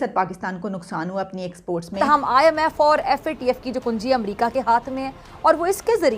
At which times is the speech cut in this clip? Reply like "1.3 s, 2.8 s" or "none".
1.9 s